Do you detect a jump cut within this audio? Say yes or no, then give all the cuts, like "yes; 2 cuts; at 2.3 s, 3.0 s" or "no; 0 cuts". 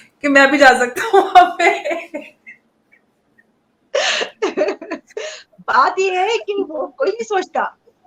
no; 0 cuts